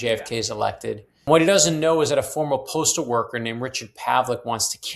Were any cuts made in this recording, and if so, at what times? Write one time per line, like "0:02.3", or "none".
0:01.3